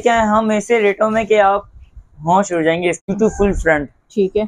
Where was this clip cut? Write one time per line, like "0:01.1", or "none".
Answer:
0:03.0